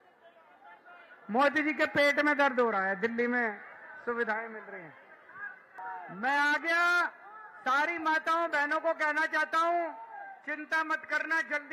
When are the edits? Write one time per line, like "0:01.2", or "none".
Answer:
0:05.8